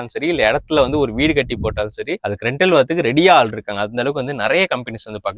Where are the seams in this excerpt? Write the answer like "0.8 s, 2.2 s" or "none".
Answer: none